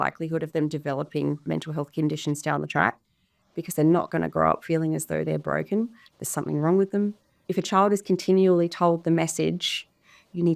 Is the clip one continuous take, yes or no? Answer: no